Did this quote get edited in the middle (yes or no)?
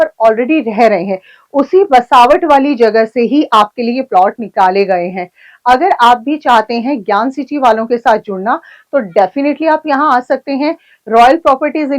no